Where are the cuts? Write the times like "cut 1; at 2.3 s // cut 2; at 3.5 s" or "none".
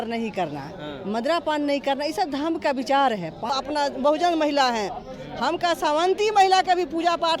cut 1; at 3.5 s